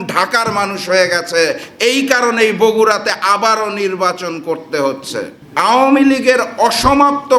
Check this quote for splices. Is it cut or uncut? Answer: cut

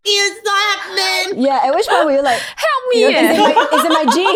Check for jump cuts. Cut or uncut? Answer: uncut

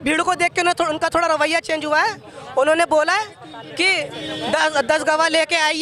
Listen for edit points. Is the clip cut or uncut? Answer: uncut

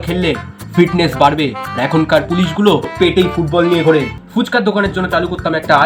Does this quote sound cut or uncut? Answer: cut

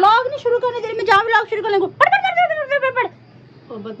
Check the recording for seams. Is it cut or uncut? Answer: cut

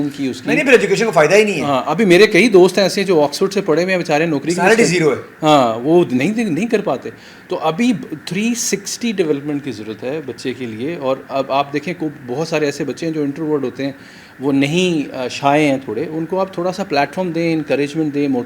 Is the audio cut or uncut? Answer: uncut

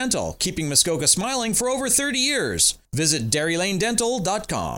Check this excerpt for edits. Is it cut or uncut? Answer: uncut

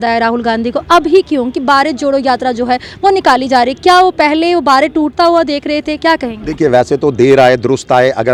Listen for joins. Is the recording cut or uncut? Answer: uncut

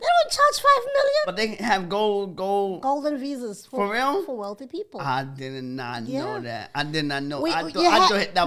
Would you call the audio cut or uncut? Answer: uncut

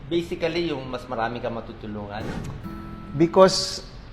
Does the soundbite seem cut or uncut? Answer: uncut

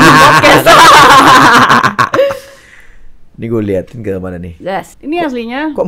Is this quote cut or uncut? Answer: cut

